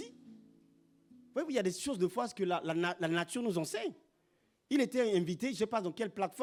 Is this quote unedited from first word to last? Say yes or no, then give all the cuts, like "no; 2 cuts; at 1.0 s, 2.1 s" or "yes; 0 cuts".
yes; 0 cuts